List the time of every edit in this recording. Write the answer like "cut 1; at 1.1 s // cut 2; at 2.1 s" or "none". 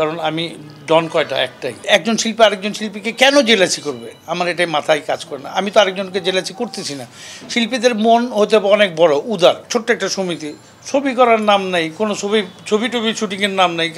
cut 1; at 1.9 s // cut 2; at 9.6 s